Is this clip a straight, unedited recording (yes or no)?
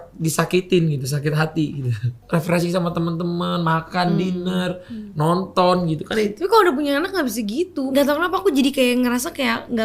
no